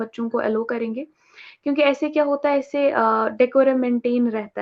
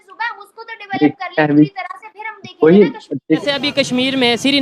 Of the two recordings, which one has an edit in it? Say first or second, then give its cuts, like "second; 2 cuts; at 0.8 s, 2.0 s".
second; 1 cut; at 3.4 s